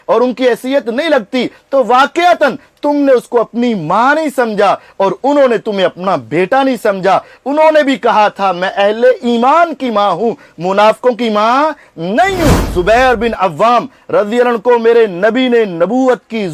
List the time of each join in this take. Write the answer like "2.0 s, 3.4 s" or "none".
12.6 s

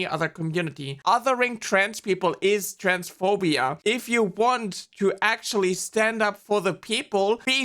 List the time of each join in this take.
1.0 s, 3.7 s

